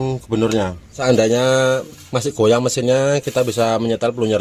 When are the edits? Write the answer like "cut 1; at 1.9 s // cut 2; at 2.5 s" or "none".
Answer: cut 1; at 1.0 s